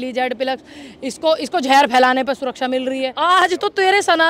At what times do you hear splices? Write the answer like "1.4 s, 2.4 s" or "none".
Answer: 3.1 s

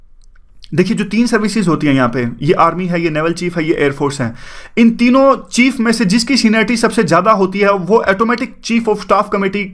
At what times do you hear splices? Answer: 1.4 s

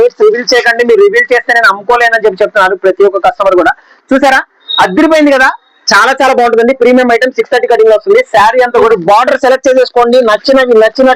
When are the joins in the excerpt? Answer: 3.9 s, 8.9 s

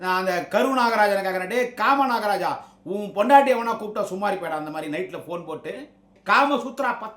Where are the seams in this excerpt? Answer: 6.1 s

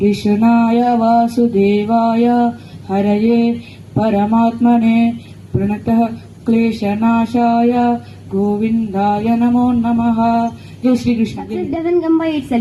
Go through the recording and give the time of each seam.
11.7 s

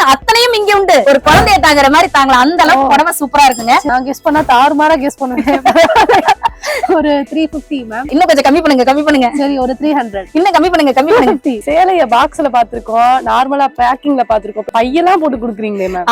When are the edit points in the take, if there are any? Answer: 1.0 s, 3.9 s, 8.1 s, 10.2 s, 11.6 s, 14.7 s

